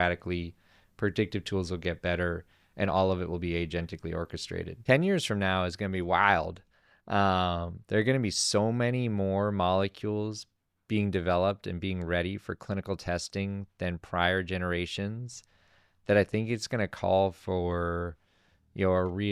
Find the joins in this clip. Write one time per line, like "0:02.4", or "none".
0:04.7

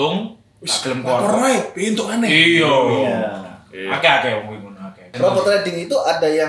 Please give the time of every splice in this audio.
0:05.1

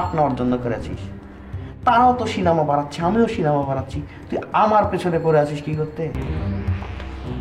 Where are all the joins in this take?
0:06.3

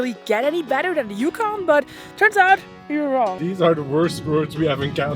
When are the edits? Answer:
0:03.4

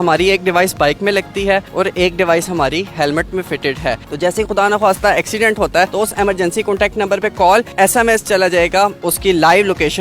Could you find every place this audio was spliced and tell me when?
0:04.0
0:05.9
0:07.7
0:09.0

